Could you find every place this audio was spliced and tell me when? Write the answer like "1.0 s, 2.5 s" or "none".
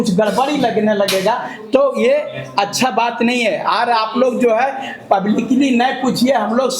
none